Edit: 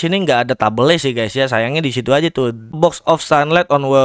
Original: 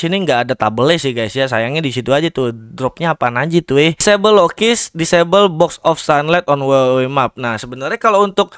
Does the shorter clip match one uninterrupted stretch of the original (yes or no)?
no